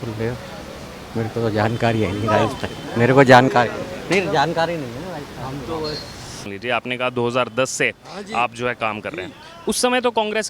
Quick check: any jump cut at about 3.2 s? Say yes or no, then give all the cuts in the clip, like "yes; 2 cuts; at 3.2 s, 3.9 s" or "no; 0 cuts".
no; 1 cut; at 6.4 s